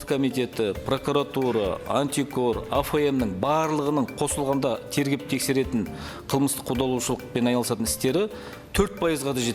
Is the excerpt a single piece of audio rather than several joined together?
yes; 0 cuts

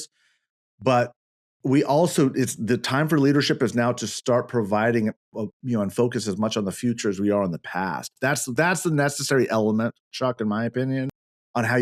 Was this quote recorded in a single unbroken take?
yes; 0 cuts

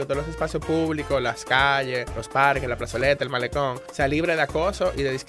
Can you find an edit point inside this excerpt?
yes; 2 cuts; at 2.2 s, 3.8 s

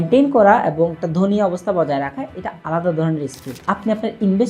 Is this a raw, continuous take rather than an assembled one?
no; 1 cut; at 3.5 s

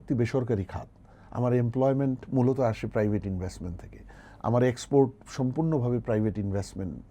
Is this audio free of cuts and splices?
yes; 0 cuts

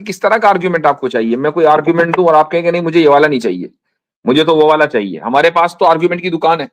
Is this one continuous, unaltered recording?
yes; 0 cuts

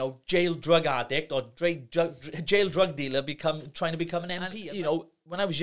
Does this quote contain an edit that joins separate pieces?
yes; 1 cut; at 4.5 s

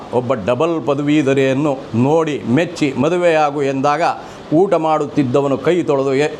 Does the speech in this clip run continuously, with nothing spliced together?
yes; 0 cuts

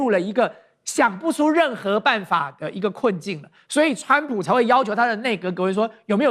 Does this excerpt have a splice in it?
no; 0 cuts

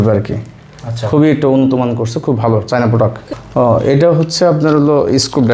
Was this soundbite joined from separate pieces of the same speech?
yes; 1 cut; at 3.3 s

